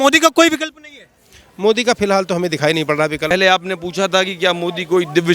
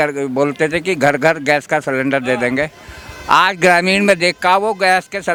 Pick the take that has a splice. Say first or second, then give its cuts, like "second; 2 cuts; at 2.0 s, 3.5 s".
first; 1 cut; at 3.3 s